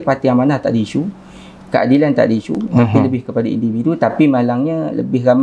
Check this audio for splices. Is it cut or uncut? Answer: uncut